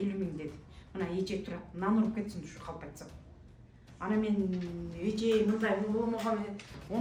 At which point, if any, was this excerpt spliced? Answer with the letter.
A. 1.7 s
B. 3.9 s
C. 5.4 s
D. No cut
D